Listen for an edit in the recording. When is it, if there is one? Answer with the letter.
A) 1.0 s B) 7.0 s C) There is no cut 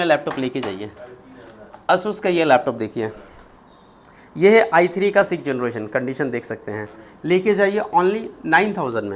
C